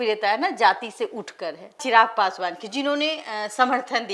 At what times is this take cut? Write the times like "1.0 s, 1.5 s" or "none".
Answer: none